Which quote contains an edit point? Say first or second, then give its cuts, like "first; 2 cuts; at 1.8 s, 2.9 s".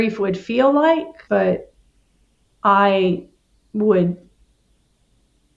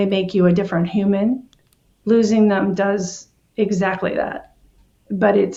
first; 1 cut; at 1.2 s